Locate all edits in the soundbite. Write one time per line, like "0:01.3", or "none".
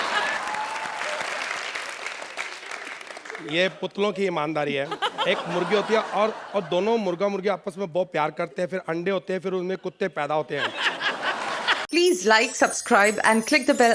0:11.8